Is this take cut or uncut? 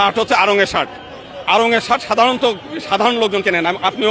uncut